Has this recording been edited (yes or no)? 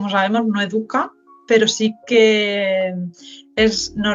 no